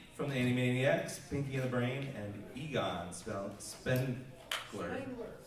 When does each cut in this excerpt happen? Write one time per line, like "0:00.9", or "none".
0:03.2